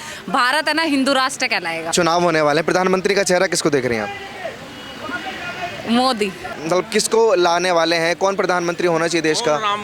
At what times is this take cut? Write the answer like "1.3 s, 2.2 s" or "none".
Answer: 1.9 s, 6.6 s